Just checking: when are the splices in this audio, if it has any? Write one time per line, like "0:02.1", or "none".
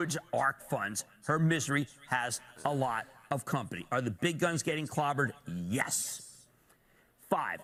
none